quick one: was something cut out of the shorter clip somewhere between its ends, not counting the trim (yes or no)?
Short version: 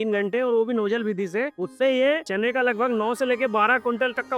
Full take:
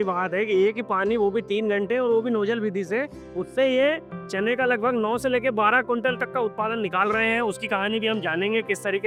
yes